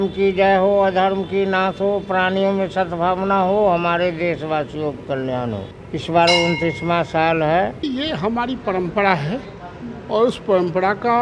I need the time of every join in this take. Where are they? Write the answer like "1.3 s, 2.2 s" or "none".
5.7 s, 7.9 s